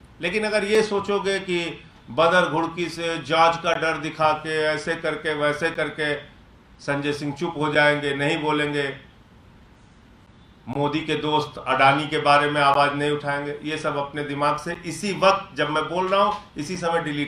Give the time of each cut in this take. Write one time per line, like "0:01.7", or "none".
none